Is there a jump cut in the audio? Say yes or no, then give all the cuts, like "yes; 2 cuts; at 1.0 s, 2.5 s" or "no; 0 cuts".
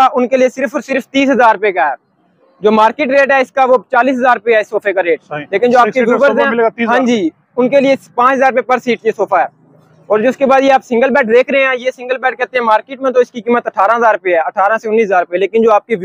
no; 0 cuts